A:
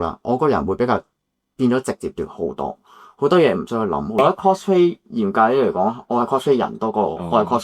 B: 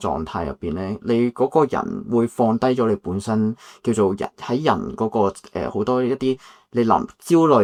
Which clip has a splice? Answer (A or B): A